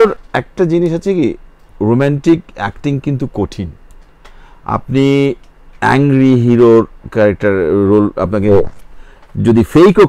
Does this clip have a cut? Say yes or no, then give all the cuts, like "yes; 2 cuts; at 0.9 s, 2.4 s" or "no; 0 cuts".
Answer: no; 0 cuts